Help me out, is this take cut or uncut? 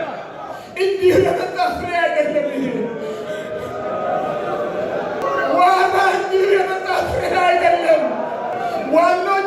cut